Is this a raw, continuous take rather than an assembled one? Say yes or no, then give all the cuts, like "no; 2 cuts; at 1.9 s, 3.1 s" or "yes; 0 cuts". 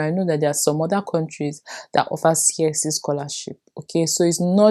yes; 0 cuts